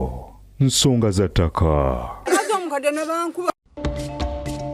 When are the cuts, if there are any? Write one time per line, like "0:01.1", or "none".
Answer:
0:02.1
0:03.5